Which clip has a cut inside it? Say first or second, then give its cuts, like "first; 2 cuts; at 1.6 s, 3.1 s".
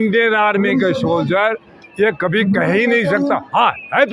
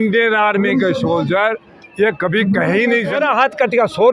second; 1 cut; at 3.2 s